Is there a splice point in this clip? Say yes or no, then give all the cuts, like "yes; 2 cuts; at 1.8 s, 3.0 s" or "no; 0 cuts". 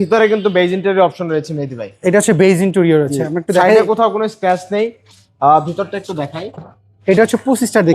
no; 0 cuts